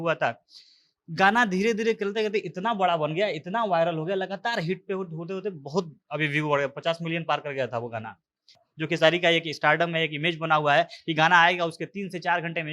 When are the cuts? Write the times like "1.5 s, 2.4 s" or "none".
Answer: 8.7 s

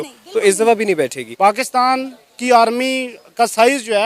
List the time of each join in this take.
1.2 s

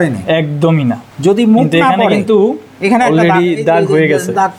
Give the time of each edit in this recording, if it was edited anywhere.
none

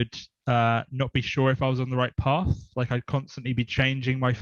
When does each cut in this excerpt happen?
none

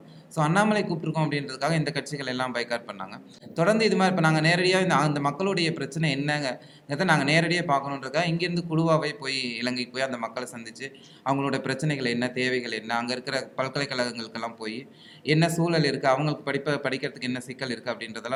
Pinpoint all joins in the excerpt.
none

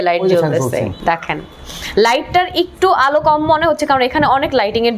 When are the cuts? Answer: 1.0 s

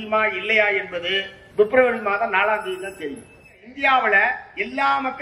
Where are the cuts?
1.3 s, 3.7 s

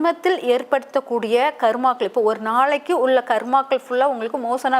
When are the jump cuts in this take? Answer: none

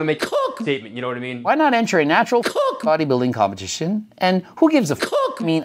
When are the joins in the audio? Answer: 1.5 s

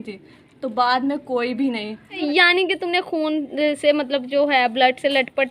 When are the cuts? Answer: 2.2 s

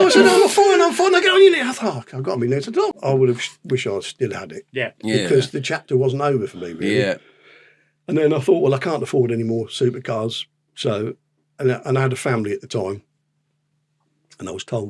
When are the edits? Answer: 2.9 s

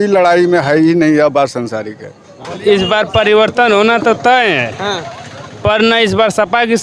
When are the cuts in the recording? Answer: 2.5 s

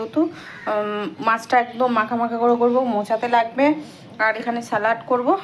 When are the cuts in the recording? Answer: none

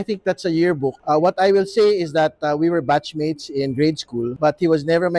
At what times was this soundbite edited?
1.0 s, 4.3 s

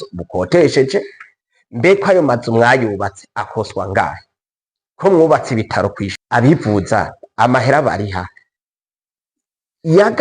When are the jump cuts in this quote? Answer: 6.1 s

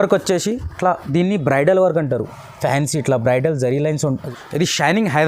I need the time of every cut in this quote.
4.1 s

